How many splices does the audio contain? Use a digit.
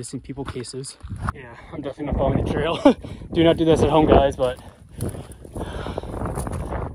1